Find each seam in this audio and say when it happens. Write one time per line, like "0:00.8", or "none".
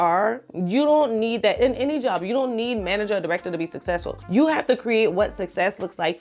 none